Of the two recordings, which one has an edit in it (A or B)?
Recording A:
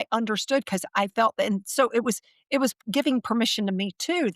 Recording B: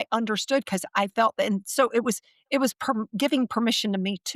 A